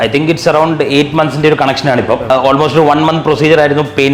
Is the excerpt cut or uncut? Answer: cut